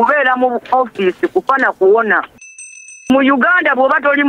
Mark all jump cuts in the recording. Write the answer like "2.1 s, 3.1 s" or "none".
2.9 s

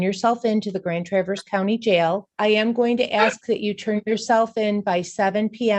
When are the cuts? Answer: 2.3 s

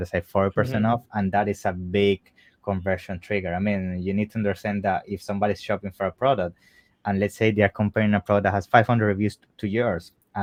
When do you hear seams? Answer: none

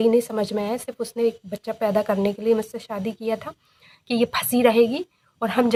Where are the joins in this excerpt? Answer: none

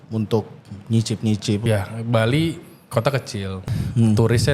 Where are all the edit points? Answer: 1.6 s, 3.6 s

